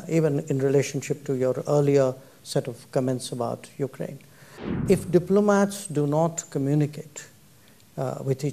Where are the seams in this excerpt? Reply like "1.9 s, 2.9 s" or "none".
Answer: 4.8 s